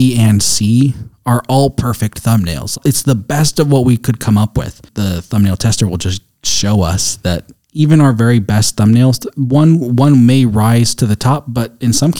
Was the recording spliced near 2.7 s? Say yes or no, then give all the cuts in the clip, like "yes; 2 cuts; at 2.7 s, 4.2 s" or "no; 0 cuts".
yes; 2 cuts; at 2.7 s, 4.9 s